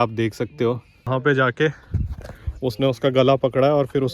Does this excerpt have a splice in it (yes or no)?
yes